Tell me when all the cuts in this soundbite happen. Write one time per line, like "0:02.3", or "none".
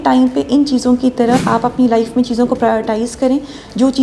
0:01.4

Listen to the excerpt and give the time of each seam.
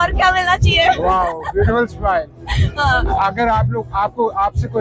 none

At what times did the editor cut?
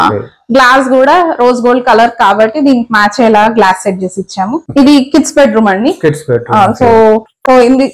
0:04.6

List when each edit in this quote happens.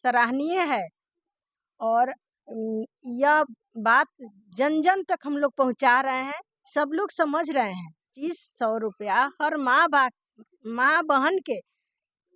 0:08.0

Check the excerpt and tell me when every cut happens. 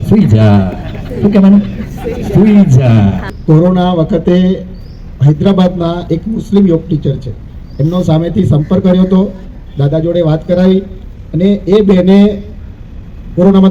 0:03.3

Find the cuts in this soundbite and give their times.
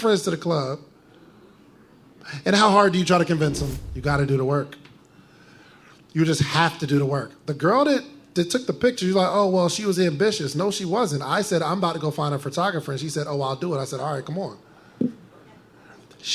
0:03.8

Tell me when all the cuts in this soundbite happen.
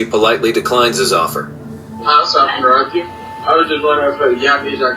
none

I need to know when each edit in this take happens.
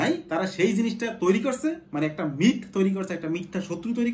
none

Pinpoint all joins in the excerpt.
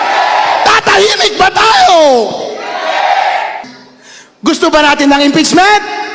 0:03.7

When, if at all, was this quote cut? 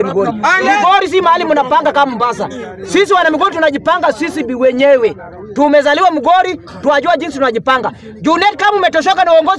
none

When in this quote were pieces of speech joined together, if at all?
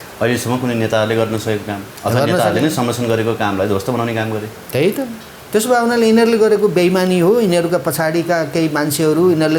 none

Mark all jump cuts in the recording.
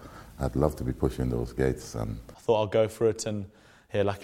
0:02.2

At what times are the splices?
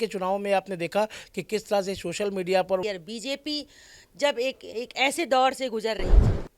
0:02.8

